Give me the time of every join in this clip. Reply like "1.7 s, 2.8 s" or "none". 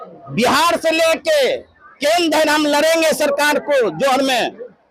none